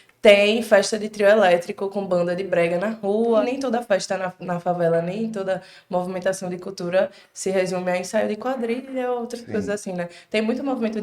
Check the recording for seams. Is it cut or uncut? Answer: cut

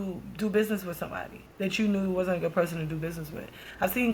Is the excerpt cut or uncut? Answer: uncut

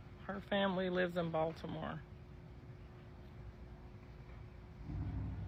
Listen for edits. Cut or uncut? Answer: uncut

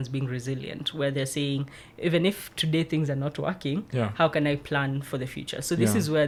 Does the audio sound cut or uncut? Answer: uncut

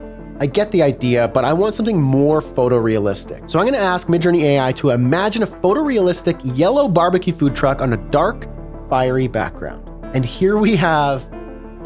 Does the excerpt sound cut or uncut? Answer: cut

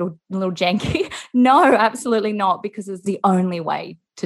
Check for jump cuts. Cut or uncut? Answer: cut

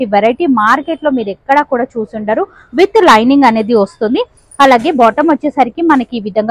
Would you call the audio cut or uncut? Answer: uncut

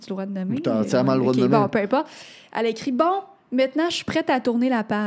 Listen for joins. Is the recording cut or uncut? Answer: uncut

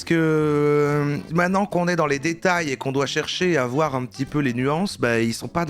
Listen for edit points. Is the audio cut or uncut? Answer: cut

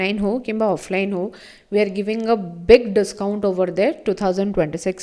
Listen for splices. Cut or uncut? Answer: uncut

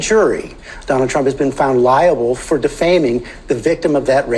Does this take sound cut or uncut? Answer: uncut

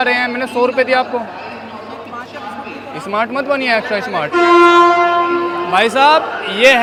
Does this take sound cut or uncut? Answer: uncut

